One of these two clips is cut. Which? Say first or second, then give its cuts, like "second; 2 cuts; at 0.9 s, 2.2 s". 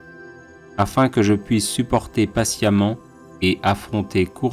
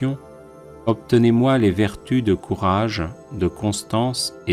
first; 1 cut; at 1.1 s